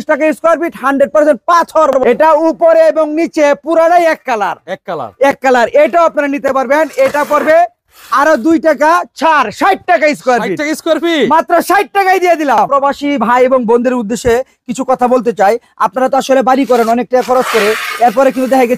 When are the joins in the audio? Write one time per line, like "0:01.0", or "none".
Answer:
0:01.9
0:12.7